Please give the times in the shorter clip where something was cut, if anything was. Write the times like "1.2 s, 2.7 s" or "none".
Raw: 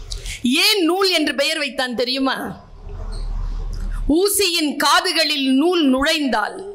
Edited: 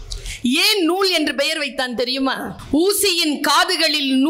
2.6 s